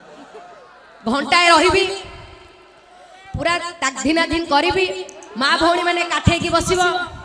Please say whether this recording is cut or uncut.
cut